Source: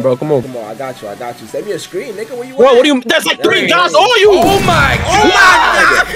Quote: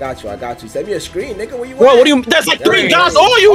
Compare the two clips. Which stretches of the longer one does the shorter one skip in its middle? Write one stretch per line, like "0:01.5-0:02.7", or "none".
none